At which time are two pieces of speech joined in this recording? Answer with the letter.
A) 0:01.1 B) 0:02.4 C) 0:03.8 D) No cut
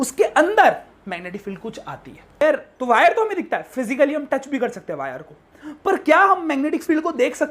B